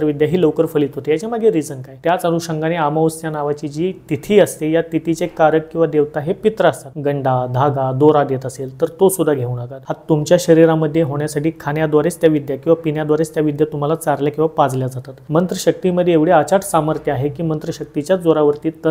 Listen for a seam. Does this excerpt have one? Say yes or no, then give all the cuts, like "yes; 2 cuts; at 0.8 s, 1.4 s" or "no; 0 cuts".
yes; 4 cuts; at 1.8 s, 6.9 s, 9.8 s, 15.2 s